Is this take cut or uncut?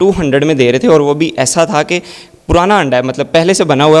uncut